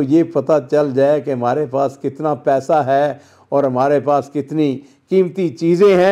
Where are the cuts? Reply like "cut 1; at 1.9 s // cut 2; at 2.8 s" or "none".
none